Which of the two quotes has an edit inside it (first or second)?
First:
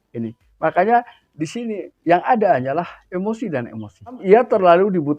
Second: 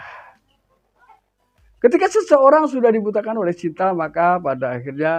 first